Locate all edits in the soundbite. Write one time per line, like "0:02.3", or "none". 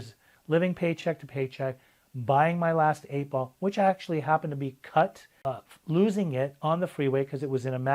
0:05.3